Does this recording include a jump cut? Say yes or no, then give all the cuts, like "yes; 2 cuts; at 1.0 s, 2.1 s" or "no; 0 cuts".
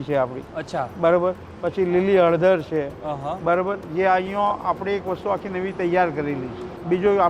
no; 0 cuts